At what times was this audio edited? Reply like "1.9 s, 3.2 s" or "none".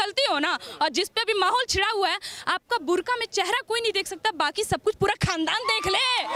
none